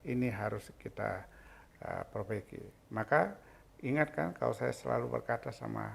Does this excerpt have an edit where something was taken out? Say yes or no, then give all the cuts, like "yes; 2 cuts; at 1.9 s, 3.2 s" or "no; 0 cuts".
no; 0 cuts